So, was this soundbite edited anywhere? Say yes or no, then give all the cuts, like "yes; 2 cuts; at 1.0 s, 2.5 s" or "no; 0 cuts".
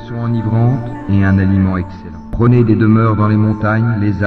yes; 1 cut; at 2.0 s